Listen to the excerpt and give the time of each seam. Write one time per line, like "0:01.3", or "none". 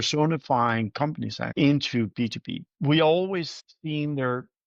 0:01.4
0:02.6